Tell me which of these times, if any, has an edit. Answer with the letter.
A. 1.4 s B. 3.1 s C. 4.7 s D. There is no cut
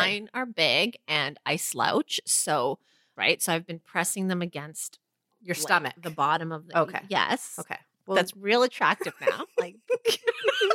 B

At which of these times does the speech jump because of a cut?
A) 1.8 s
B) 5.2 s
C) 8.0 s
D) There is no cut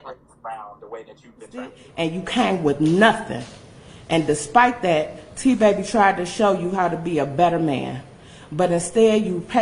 A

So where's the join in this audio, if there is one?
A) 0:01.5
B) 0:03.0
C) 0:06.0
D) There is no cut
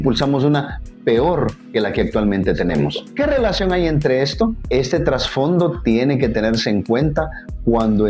B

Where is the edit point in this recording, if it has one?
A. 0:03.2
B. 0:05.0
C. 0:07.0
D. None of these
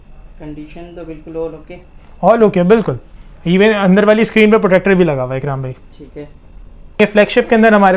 C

